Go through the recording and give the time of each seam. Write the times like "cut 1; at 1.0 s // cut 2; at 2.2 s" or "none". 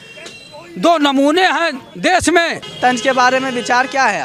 cut 1; at 2.6 s